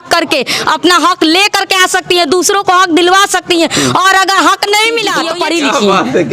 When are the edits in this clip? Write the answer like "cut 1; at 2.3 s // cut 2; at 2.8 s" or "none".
cut 1; at 5.3 s